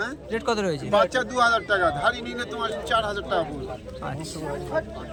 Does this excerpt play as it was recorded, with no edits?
yes; 0 cuts

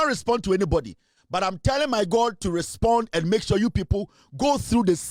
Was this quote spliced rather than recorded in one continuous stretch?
no; 0 cuts

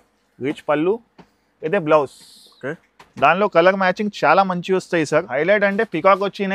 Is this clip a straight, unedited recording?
no; 1 cut; at 5.3 s

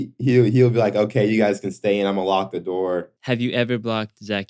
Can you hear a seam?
yes; 1 cut; at 3.1 s

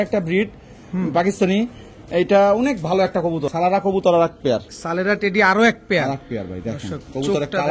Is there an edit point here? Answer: yes; 1 cut; at 3.4 s

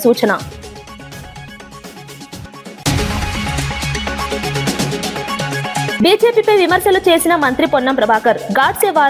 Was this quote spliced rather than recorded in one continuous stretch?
no; 0 cuts

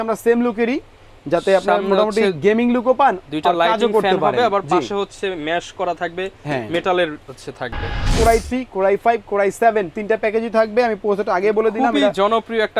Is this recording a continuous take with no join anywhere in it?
no; 1 cut; at 8.1 s

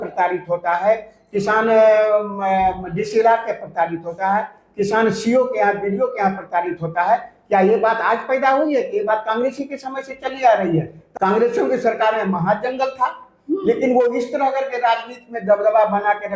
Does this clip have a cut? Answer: yes; 1 cut; at 11.0 s

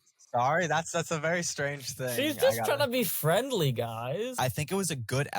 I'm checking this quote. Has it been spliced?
yes; 1 cut; at 4.3 s

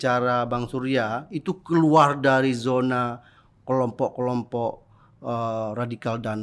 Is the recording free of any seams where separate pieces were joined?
yes; 0 cuts

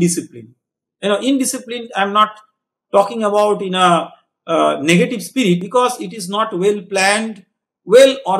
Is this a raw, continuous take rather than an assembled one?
no; 1 cut; at 5.6 s

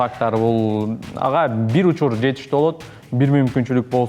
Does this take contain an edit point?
no; 0 cuts

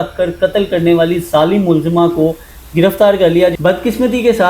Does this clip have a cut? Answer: yes; 1 cut; at 3.6 s

